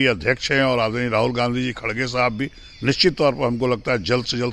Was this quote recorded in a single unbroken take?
yes; 0 cuts

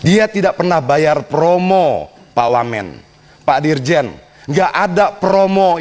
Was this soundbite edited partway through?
no; 0 cuts

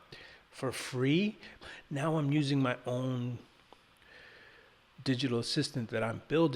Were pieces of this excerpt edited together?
yes; 1 cut; at 1.6 s

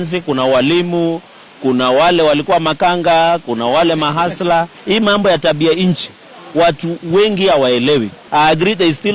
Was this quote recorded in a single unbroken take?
no; 2 cuts; at 4.7 s, 8.2 s

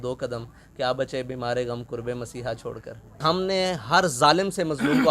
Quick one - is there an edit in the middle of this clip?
yes; 1 cut; at 3.2 s

